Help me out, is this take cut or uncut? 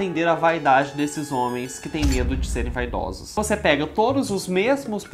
cut